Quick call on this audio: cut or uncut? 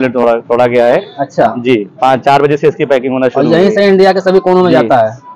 uncut